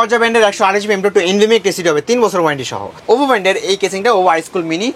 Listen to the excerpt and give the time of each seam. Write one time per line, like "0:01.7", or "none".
0:03.0